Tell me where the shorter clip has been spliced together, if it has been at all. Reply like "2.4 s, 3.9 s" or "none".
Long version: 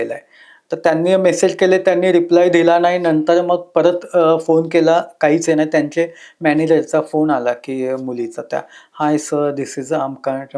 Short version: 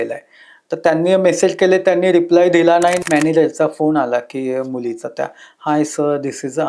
3.0 s